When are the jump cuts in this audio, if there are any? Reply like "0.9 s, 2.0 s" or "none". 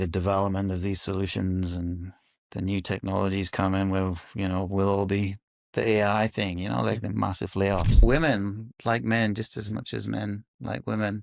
8.0 s